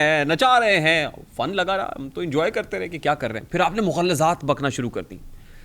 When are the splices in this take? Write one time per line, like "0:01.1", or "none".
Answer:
none